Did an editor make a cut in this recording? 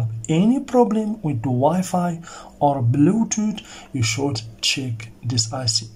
no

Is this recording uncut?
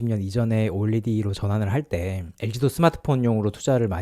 yes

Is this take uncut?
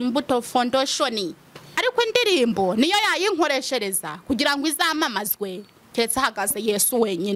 no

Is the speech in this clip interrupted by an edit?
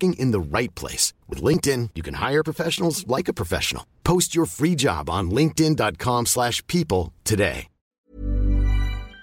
yes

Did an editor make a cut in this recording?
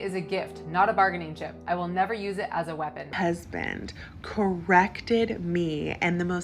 yes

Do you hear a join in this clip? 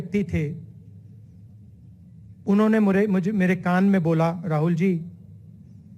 no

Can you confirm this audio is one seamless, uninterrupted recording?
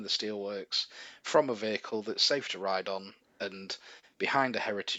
yes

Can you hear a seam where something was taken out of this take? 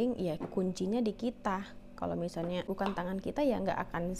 yes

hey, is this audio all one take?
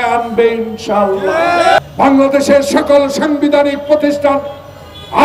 no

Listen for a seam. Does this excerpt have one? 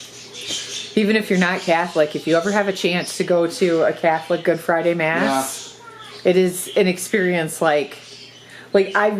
no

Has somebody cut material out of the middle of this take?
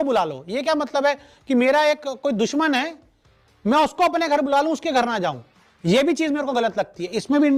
no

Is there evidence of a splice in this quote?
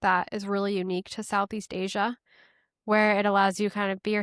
no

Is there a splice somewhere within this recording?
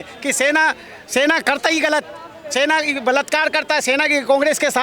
no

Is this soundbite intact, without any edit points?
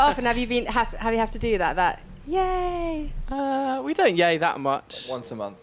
no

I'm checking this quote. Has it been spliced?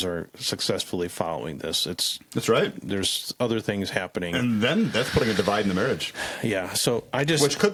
no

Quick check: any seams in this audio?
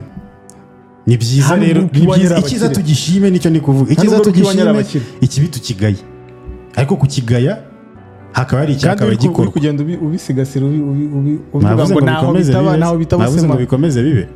no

